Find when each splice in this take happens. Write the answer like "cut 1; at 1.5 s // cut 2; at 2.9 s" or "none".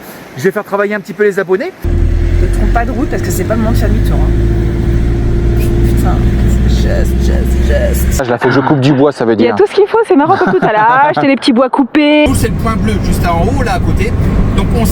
cut 1; at 1.8 s // cut 2; at 8.2 s // cut 3; at 12.3 s